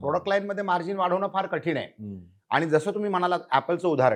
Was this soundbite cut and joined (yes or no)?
no